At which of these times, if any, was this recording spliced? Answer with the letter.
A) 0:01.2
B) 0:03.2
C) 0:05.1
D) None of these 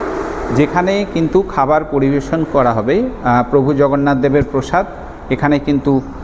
D